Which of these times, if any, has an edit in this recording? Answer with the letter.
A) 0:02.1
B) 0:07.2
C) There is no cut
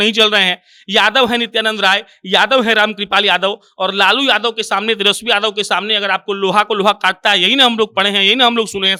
C